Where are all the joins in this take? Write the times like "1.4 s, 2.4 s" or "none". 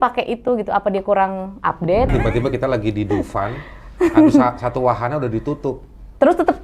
2.1 s